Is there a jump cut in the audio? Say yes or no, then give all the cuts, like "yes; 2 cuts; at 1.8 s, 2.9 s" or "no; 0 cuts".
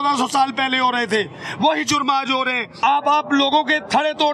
yes; 1 cut; at 2.8 s